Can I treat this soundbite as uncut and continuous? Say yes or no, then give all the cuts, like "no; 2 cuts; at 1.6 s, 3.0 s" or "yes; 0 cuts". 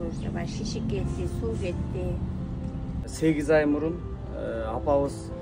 no; 1 cut; at 3.1 s